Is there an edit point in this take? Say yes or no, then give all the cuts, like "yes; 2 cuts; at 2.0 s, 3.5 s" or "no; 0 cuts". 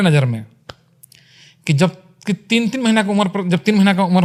no; 0 cuts